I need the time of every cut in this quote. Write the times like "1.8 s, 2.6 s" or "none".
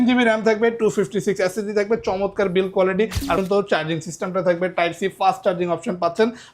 3.4 s

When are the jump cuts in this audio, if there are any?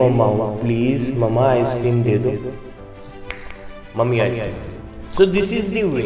none

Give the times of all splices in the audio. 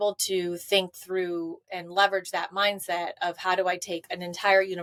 none

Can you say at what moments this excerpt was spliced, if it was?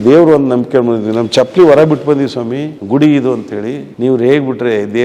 2.7 s, 3.9 s

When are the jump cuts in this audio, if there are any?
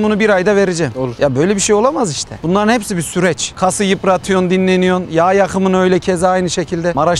none

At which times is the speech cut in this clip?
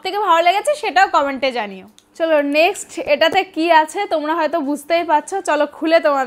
none

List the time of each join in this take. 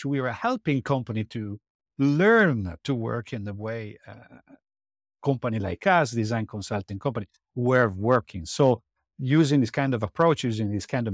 none

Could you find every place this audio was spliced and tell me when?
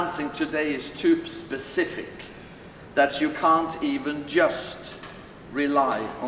none

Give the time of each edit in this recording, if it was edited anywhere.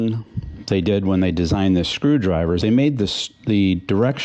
none

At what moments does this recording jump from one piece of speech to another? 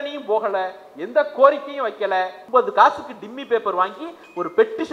2.4 s

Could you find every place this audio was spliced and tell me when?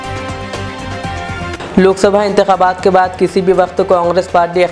none

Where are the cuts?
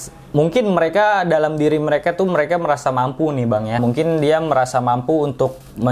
3.8 s

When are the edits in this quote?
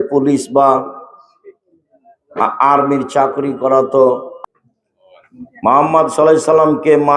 4.4 s

